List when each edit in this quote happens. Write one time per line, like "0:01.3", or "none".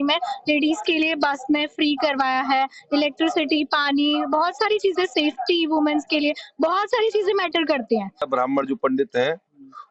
0:08.2

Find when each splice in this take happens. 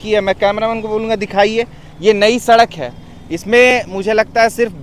none

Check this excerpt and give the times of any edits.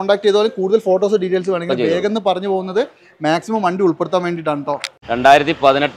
0:04.8

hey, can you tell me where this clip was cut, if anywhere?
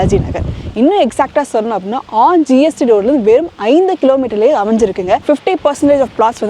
0:05.2

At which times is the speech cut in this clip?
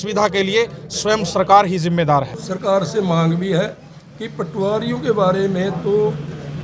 0:02.4

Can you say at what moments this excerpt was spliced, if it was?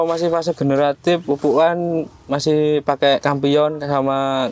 0:01.2
0:03.2

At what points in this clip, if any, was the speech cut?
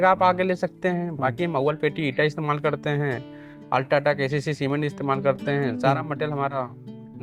none

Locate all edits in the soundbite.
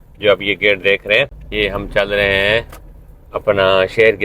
0:01.4

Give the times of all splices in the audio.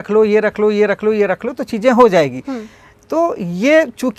none

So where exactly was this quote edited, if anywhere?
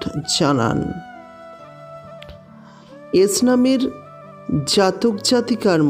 0:01.4
0:03.1

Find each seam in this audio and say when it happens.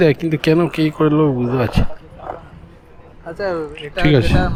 none

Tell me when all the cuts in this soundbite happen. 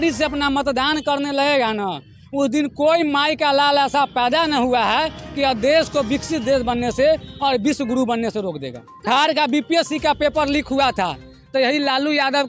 0:09.1

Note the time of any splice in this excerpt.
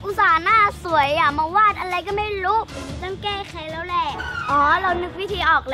0:02.8

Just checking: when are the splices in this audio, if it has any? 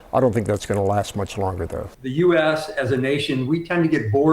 0:01.9

